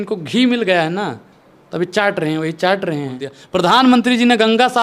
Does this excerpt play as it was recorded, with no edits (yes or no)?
no